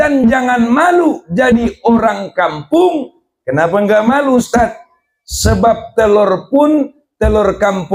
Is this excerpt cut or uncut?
uncut